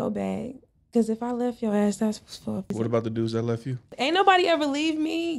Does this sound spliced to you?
yes; 2 cuts; at 2.7 s, 3.9 s

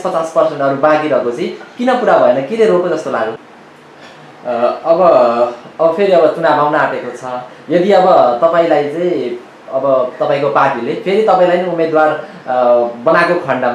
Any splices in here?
yes; 1 cut; at 3.4 s

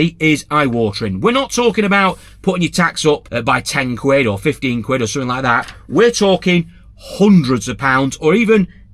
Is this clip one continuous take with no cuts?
no; 1 cut; at 3.3 s

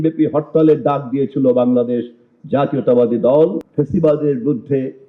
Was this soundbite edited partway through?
yes; 1 cut; at 3.6 s

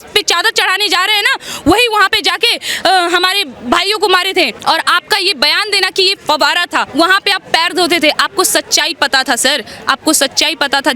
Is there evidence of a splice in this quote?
yes; 2 cuts; at 4.6 s, 6.9 s

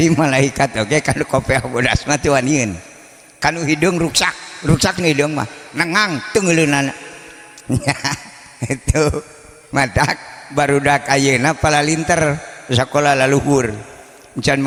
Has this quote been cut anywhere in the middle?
no; 0 cuts

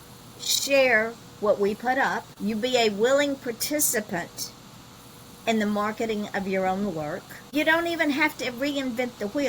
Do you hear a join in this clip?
yes; 2 cuts; at 2.3 s, 7.5 s

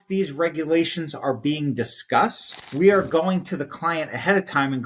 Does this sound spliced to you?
no; 0 cuts

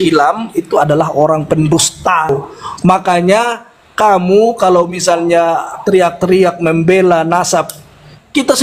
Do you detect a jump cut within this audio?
yes; 1 cut; at 2.3 s

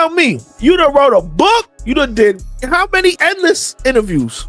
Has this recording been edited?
yes; 1 cut; at 3.2 s

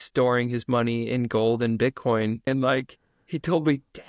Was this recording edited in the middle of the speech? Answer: yes; 1 cut; at 2.5 s

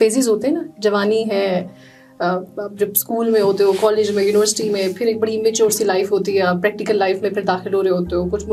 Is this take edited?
no; 0 cuts

